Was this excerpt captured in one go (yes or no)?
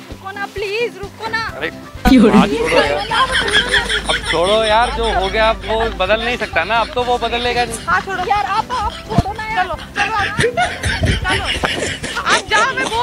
yes